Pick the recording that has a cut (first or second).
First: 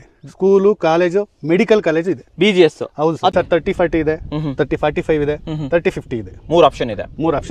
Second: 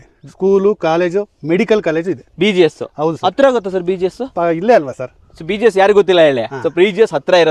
first